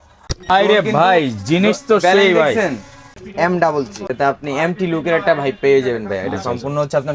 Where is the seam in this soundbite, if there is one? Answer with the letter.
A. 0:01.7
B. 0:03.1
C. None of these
B